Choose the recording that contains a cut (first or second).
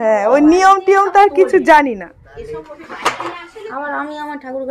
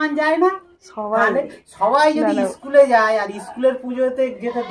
first